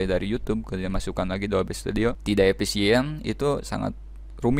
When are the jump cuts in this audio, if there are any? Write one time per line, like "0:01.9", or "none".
0:02.2